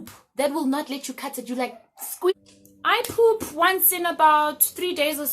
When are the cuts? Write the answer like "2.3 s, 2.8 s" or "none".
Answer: 2.3 s